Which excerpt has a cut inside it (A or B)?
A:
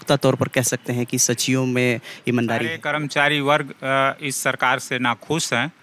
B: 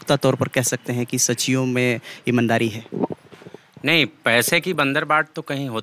A